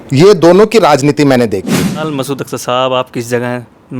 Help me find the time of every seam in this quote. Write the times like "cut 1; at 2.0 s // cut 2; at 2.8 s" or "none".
cut 1; at 2.0 s